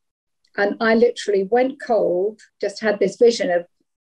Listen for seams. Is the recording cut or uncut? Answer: cut